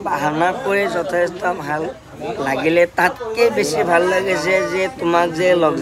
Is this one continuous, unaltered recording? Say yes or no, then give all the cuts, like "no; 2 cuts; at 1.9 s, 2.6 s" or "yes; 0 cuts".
yes; 0 cuts